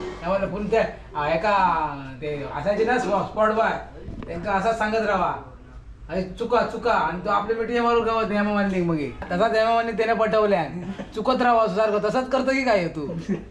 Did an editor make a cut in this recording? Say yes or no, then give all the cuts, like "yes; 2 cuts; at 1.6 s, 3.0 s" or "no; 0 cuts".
yes; 1 cut; at 9.2 s